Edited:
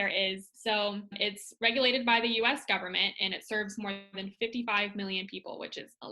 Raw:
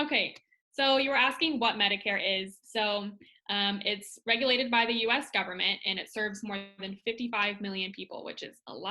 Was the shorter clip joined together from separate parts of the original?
yes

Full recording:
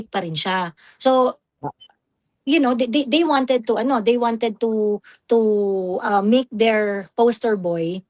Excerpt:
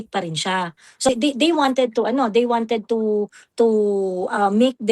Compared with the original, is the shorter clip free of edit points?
no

